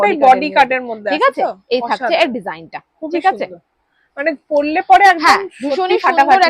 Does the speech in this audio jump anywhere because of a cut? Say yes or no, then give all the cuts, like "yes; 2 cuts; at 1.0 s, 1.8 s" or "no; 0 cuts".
no; 0 cuts